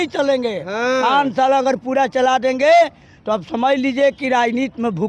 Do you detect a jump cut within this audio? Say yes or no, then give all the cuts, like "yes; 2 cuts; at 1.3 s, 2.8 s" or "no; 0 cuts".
no; 0 cuts